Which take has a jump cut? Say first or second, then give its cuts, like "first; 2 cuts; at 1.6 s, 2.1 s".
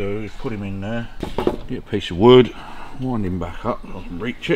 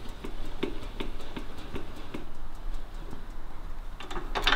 first; 1 cut; at 1.2 s